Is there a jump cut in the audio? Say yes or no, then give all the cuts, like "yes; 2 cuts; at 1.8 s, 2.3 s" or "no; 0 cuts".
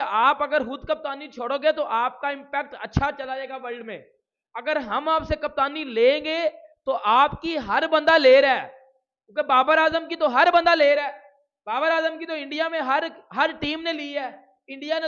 no; 0 cuts